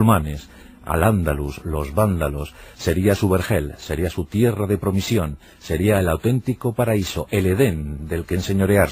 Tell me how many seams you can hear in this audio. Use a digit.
1